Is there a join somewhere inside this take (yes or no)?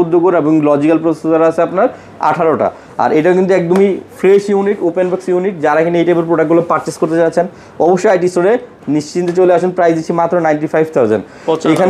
no